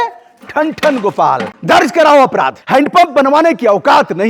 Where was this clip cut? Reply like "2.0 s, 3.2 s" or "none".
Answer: 1.5 s, 2.6 s